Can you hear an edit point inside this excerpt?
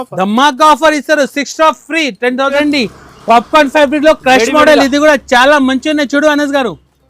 yes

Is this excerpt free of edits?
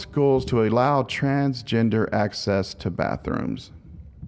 no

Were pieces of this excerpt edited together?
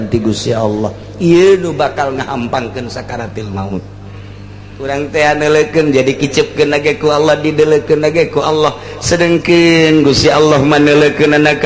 yes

